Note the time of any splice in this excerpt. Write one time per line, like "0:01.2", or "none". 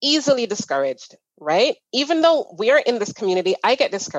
none